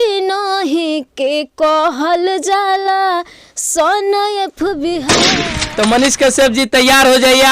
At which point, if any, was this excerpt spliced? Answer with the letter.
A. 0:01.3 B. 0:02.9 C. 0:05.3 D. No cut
C